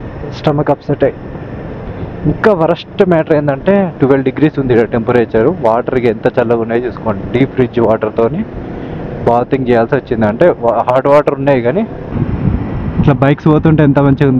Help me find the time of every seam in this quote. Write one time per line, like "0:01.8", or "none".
0:12.1